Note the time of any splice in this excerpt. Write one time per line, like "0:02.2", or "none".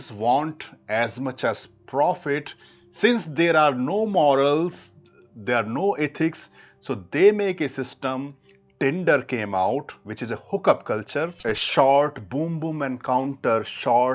0:11.3